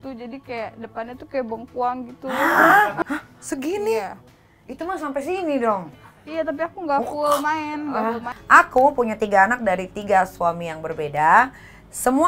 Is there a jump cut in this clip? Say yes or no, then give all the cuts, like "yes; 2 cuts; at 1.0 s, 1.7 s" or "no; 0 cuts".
yes; 2 cuts; at 3.0 s, 8.3 s